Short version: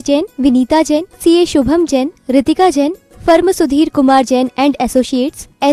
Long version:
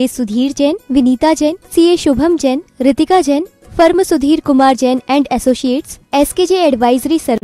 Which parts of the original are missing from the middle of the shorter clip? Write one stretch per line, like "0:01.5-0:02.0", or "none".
none